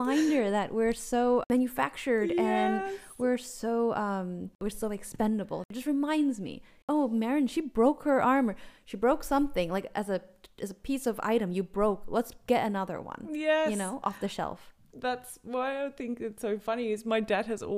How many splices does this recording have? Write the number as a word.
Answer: four